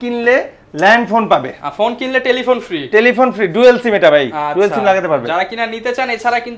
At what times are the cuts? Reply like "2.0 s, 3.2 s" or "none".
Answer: none